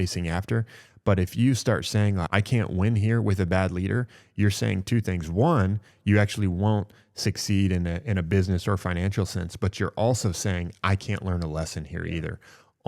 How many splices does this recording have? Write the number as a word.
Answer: one